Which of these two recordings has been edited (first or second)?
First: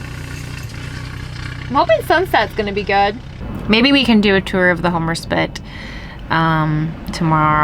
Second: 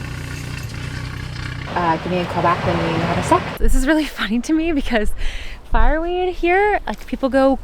second